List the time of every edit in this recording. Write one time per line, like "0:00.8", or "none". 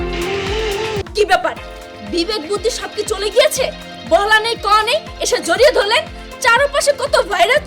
0:01.0

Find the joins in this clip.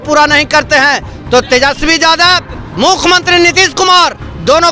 0:02.6

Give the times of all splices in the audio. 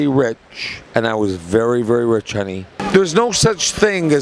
0:02.9

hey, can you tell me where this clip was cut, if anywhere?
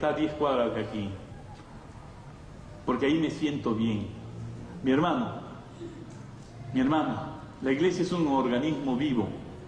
none

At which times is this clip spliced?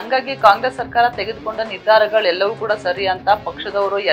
none

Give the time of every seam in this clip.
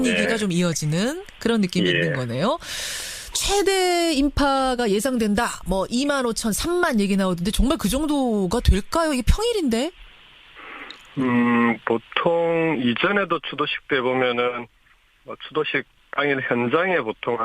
0:01.4

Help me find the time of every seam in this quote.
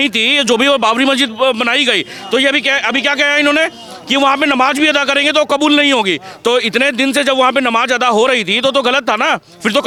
none

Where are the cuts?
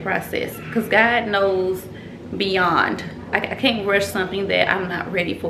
0:03.3

